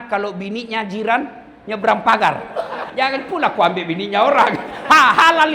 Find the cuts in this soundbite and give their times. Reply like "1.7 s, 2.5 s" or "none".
2.8 s